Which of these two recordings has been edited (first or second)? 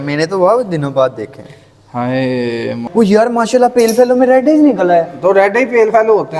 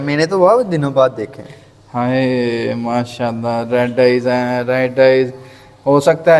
first